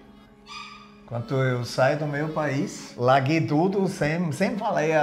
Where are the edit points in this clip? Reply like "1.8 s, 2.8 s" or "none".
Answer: none